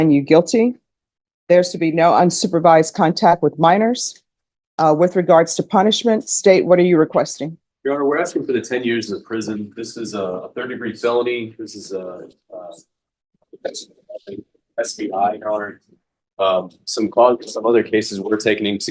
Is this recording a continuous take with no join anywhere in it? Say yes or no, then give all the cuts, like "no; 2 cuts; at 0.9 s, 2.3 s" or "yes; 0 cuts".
yes; 0 cuts